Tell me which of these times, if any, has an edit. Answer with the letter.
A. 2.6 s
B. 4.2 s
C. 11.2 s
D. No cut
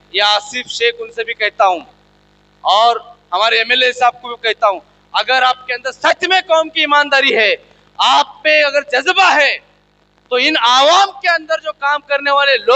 D